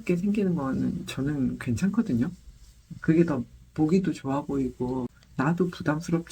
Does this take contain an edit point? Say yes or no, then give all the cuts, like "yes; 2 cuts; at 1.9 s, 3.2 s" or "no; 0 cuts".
yes; 1 cut; at 5.2 s